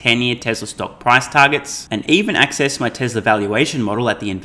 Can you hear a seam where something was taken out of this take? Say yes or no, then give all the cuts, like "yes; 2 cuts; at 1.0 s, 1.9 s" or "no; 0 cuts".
no; 0 cuts